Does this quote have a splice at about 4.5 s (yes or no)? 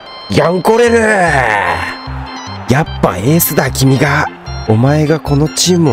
yes